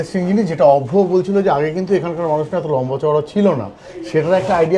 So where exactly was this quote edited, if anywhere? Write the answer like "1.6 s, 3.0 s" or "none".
none